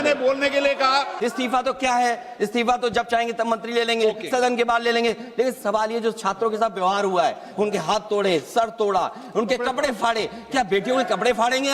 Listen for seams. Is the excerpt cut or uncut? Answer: cut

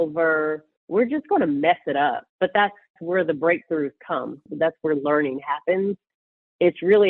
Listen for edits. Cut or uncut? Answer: cut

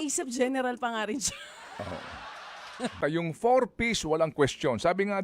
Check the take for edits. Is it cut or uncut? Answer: cut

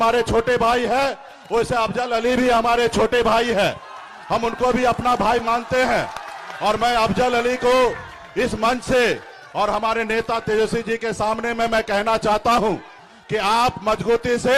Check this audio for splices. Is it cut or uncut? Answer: uncut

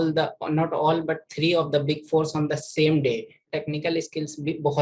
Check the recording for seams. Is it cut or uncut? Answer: cut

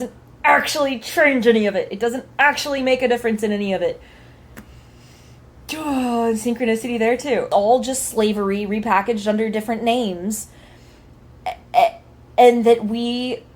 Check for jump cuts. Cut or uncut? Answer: cut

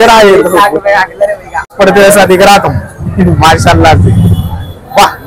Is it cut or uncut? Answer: cut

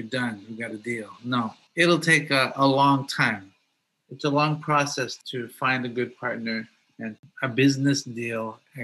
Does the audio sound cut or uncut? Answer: cut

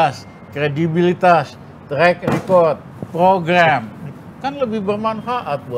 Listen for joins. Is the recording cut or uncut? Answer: uncut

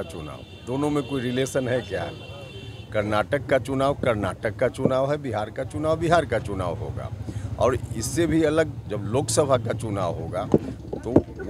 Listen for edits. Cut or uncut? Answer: uncut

